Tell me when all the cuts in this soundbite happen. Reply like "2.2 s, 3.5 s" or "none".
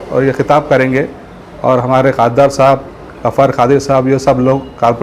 none

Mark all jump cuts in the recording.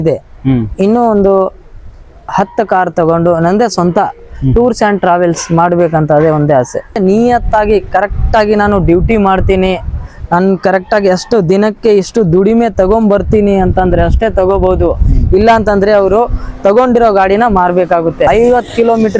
7.0 s, 18.3 s

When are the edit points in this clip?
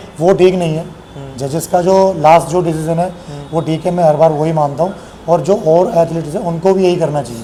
none

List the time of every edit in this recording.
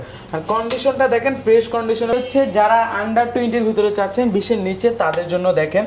2.1 s

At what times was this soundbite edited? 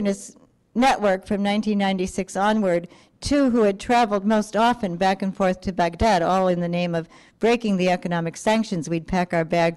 8.4 s

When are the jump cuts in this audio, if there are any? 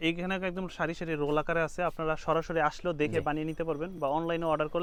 none

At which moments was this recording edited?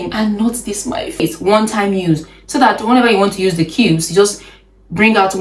1.2 s

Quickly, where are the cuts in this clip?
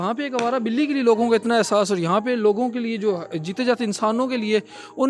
none

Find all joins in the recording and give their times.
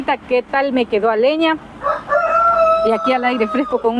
none

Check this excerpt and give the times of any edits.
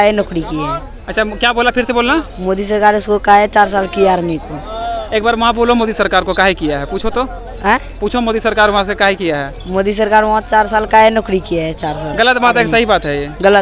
none

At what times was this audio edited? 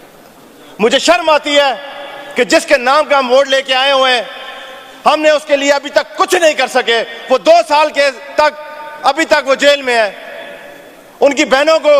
none

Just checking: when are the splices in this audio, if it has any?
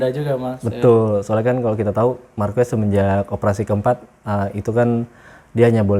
none

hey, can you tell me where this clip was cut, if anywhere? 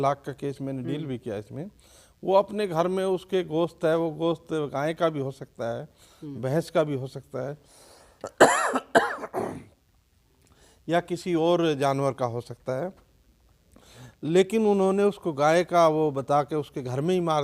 none

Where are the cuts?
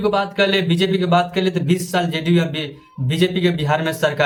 none

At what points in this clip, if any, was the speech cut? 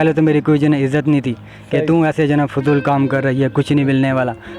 none

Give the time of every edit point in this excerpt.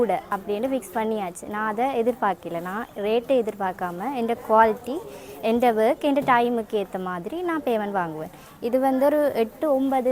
none

